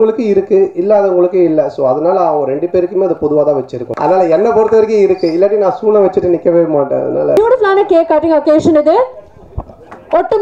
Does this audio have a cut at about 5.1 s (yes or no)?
no